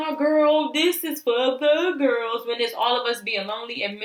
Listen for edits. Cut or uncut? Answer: uncut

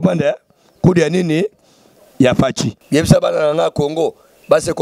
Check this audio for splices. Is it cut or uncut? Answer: cut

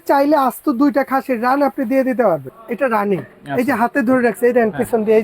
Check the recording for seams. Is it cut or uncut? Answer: cut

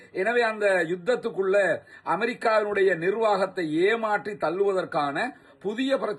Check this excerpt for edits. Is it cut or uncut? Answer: uncut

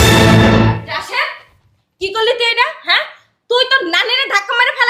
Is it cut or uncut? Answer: cut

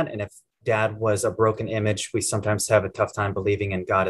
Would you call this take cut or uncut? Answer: uncut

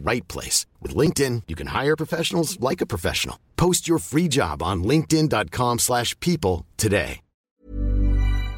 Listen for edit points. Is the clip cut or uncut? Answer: cut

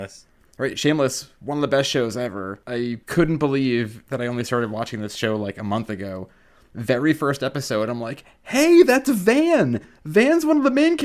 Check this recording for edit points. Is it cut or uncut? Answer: cut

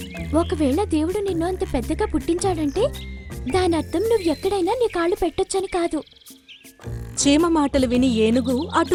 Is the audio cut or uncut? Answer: uncut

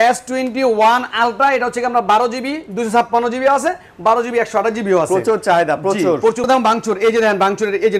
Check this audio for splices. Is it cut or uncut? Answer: cut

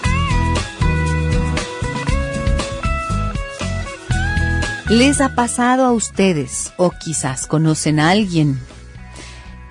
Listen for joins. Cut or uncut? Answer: cut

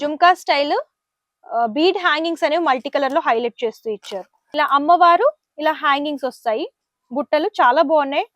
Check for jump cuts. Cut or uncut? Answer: cut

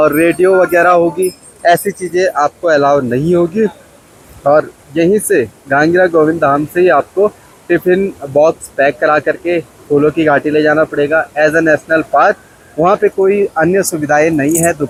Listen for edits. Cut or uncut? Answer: uncut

